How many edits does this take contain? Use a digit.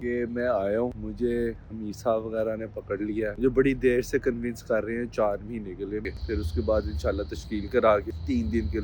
1